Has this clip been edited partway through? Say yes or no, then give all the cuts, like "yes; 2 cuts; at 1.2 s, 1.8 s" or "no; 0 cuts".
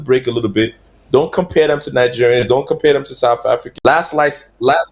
yes; 1 cut; at 3.7 s